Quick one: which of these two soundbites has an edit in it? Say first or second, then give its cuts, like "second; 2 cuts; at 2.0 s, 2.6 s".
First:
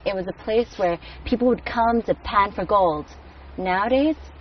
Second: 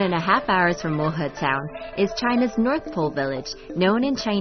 first; 1 cut; at 2.0 s